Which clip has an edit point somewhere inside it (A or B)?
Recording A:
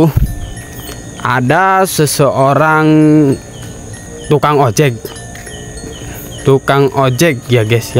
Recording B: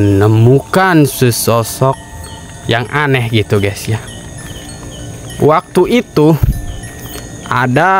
B